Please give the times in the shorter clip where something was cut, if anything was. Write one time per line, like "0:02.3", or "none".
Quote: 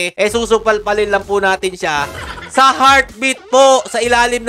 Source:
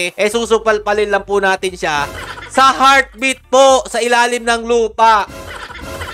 none